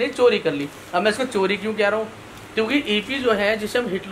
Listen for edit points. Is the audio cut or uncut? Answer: uncut